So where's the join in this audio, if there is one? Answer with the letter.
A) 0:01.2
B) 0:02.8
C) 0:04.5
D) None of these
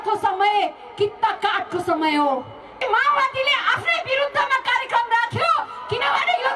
B